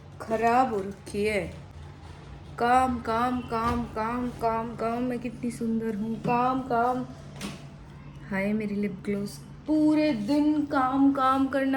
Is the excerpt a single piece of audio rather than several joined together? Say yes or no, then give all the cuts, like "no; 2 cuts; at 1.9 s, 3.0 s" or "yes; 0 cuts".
yes; 0 cuts